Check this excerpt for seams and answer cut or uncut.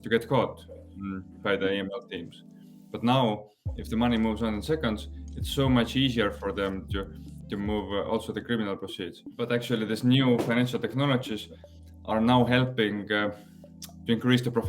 cut